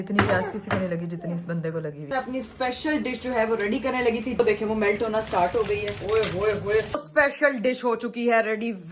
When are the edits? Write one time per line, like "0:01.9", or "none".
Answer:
0:02.1
0:04.4
0:05.9
0:07.1